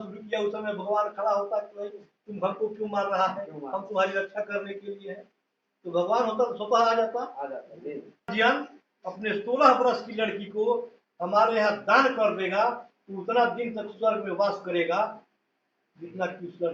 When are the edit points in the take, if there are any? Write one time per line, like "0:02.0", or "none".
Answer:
0:08.3